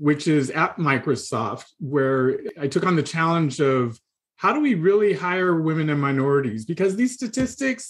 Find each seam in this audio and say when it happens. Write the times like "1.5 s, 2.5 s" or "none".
none